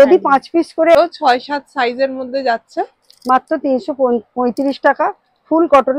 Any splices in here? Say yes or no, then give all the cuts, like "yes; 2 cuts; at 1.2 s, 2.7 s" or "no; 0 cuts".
yes; 1 cut; at 1.0 s